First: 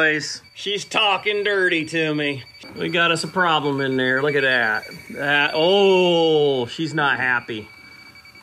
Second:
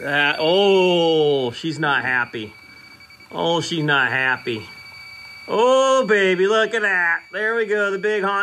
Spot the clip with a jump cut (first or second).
first